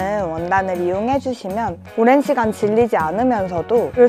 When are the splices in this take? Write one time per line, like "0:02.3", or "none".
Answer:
0:01.8